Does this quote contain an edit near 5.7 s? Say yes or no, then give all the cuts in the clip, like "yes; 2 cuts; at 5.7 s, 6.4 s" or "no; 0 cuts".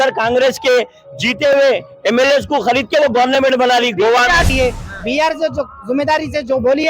no; 1 cut; at 4.5 s